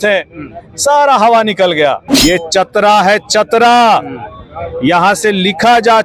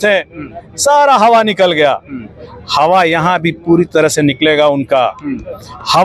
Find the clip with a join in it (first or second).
first